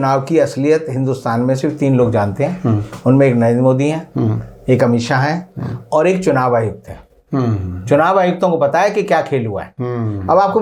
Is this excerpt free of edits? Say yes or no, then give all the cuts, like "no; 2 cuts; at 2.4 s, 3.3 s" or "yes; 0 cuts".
yes; 0 cuts